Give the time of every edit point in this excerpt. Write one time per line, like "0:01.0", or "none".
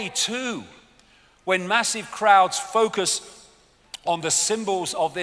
0:04.2